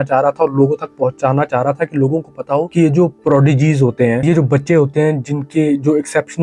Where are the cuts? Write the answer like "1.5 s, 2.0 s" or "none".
none

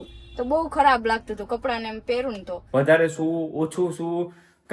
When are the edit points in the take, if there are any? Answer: 2.5 s

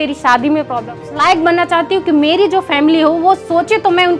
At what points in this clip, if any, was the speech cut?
1.0 s

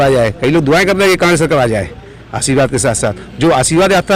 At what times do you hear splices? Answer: none

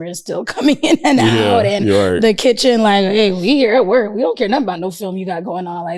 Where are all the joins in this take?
none

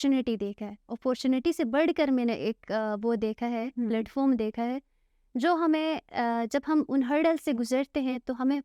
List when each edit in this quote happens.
none

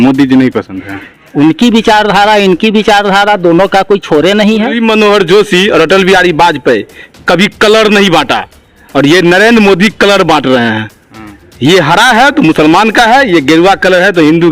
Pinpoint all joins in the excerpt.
4.7 s

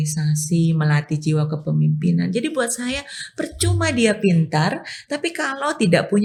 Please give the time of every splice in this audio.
none

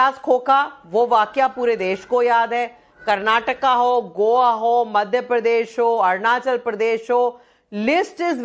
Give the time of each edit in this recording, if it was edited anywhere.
none

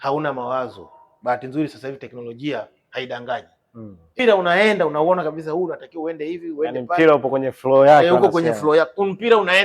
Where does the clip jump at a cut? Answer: 4.2 s

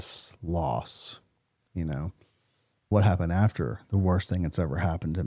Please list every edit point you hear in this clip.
2.9 s

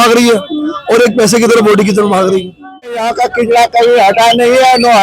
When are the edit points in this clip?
3.0 s

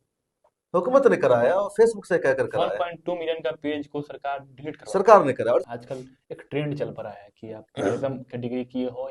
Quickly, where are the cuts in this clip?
5.7 s

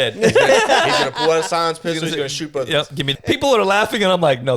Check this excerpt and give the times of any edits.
3.1 s

